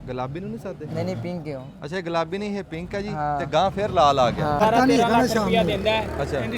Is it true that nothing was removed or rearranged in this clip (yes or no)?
no